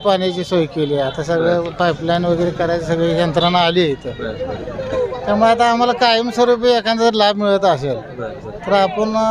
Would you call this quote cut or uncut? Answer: uncut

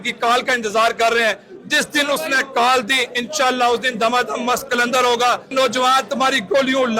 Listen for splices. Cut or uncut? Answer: cut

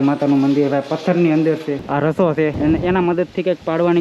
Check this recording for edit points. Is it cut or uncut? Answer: cut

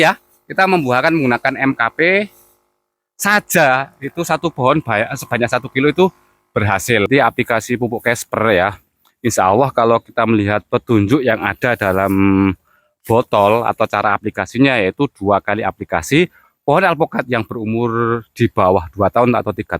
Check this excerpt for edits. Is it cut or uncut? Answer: cut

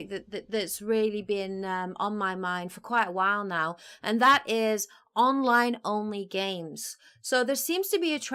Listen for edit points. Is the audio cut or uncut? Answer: uncut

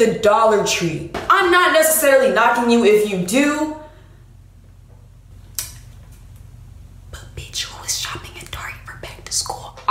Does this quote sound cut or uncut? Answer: cut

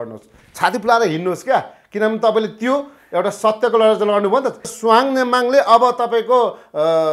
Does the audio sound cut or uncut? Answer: cut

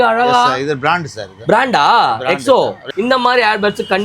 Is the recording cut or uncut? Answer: cut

